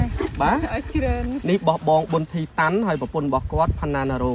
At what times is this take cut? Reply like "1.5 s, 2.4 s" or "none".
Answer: 1.4 s